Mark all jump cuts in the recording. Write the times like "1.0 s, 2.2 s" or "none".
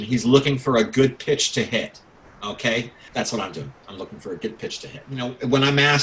3.0 s, 5.0 s